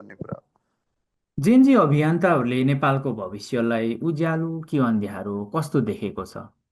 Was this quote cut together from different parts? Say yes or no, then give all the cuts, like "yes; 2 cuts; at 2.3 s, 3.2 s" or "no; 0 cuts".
yes; 1 cut; at 1.2 s